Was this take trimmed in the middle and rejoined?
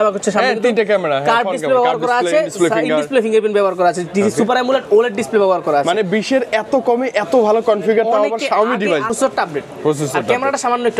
yes; 1 cut; at 9.1 s

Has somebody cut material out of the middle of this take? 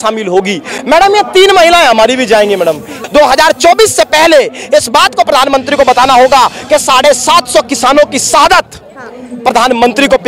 yes; 1 cut; at 3.0 s

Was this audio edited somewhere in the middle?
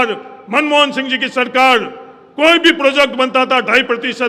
no; 0 cuts

